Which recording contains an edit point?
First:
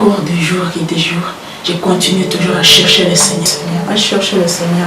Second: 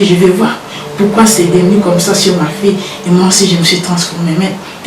first; 1 cut; at 3.5 s

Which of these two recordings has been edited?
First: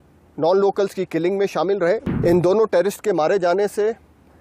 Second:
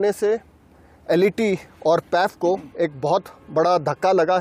first; 1 cut; at 2.1 s

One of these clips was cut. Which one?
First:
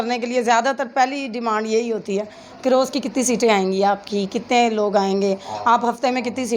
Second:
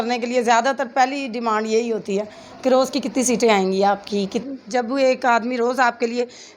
second; 1 cut; at 4.4 s

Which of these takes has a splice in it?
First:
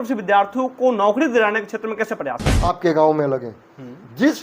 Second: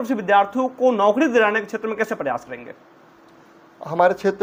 first; 1 cut; at 2.5 s

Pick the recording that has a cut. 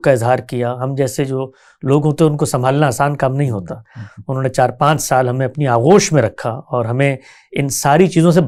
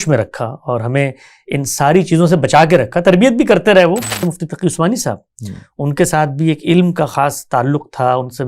second; 1 cut; at 4.3 s

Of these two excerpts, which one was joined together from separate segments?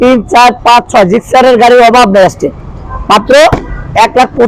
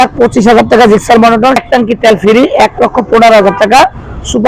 second; 1 cut; at 1.6 s

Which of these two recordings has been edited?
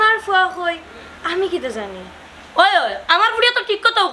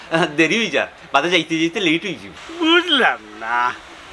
second; 1 cut; at 2.3 s

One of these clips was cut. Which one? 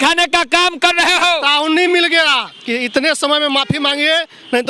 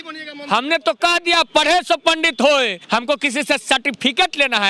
second; 1 cut; at 2.8 s

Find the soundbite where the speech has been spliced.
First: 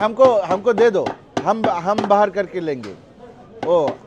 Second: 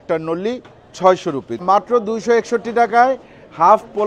second; 1 cut; at 1.6 s

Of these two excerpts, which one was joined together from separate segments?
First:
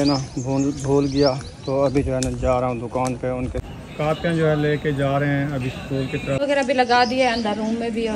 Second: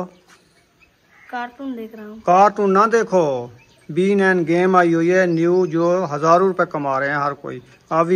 first; 2 cuts; at 3.6 s, 6.4 s

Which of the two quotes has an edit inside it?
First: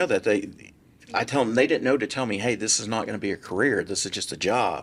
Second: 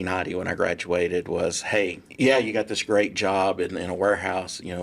second; 1 cut; at 2.0 s

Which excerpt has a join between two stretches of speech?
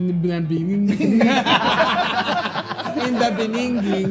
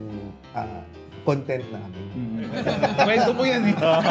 second; 1 cut; at 2.6 s

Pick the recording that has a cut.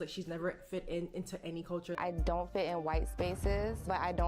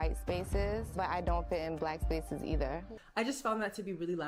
first; 1 cut; at 2.0 s

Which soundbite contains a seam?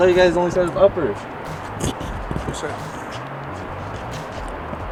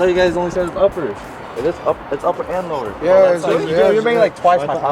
second; 1 cut; at 1.4 s

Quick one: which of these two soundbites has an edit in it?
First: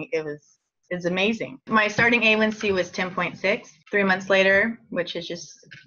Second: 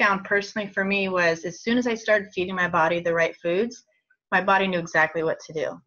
first; 1 cut; at 1.6 s

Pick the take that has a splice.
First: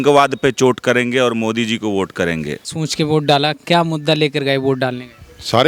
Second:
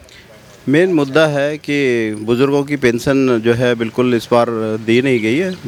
first; 1 cut; at 2.8 s

